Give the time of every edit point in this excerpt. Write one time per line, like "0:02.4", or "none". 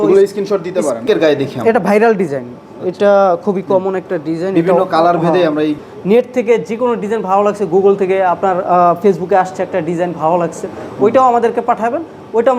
0:01.1
0:05.8